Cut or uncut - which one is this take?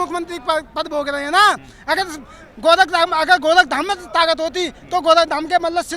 uncut